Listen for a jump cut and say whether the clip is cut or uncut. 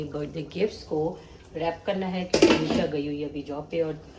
uncut